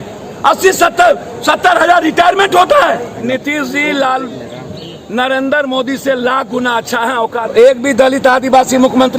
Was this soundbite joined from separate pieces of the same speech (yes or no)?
yes